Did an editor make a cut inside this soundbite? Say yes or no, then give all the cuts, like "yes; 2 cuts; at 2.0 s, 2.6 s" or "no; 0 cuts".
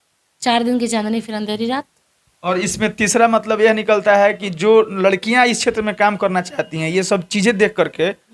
no; 0 cuts